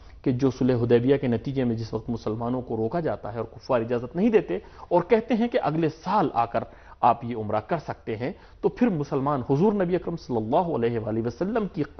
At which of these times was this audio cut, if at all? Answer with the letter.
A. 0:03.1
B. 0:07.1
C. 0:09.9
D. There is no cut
A